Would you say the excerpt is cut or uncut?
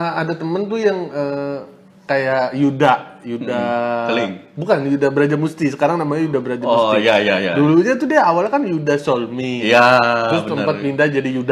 uncut